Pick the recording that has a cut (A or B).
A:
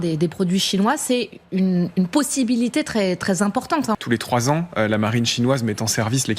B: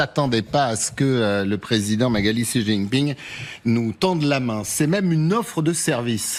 A